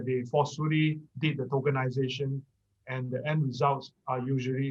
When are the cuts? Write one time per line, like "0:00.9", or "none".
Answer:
none